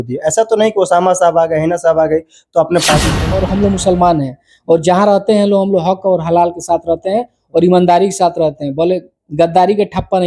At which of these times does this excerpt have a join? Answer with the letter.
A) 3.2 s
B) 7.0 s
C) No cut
A